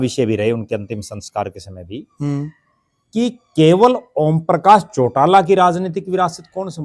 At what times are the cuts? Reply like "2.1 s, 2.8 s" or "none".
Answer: none